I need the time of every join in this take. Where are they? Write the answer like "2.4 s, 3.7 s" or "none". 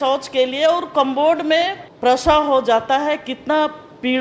1.8 s